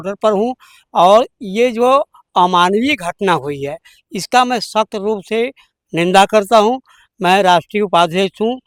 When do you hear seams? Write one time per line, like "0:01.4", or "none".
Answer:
none